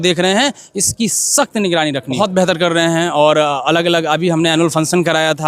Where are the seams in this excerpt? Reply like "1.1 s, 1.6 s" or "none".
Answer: 2.1 s